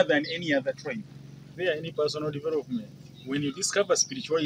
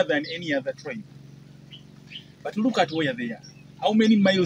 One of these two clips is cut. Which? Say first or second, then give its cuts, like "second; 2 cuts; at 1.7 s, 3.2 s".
first; 1 cut; at 1.5 s